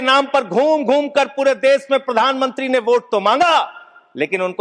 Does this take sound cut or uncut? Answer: uncut